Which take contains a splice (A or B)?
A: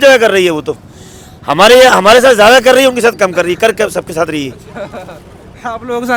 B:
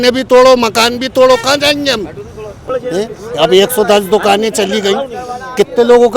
B